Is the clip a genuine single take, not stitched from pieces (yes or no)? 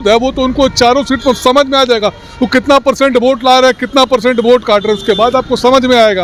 yes